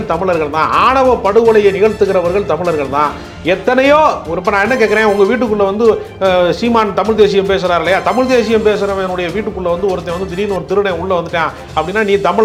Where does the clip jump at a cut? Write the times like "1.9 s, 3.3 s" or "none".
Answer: none